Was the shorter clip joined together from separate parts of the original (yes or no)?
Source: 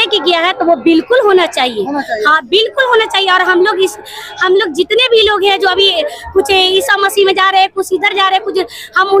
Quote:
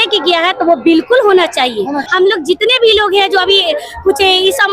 yes